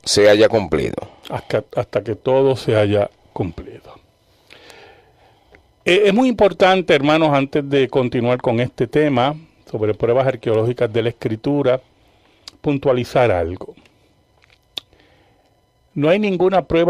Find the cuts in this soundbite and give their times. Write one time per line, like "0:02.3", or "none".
none